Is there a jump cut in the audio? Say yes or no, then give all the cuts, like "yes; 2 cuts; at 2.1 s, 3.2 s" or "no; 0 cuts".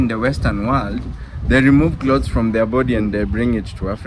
no; 0 cuts